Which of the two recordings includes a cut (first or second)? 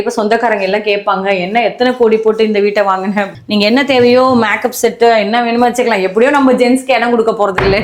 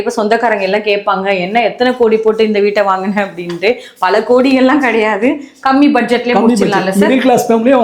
first